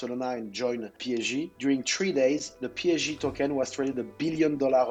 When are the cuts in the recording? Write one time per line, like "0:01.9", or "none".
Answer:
none